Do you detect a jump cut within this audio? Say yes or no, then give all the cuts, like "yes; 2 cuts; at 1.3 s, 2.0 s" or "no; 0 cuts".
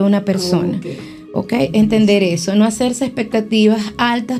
no; 0 cuts